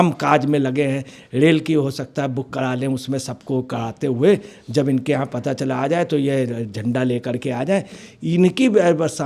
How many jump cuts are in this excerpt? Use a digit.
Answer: 1